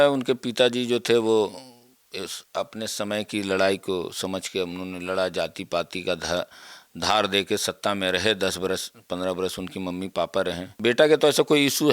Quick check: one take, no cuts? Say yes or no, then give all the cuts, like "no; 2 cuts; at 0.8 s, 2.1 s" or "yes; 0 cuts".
no; 1 cut; at 10.7 s